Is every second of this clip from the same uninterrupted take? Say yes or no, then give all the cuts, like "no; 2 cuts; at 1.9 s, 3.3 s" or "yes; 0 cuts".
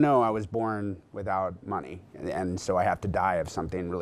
yes; 0 cuts